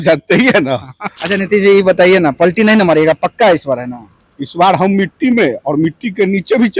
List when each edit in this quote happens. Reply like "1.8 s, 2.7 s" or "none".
1.1 s